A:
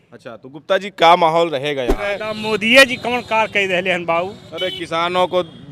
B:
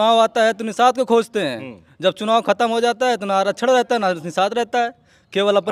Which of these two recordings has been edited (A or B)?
A